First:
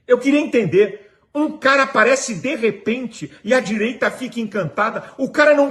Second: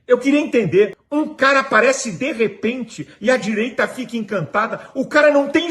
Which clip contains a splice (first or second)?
second